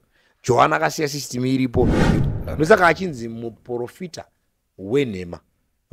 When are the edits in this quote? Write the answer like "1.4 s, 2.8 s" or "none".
2.2 s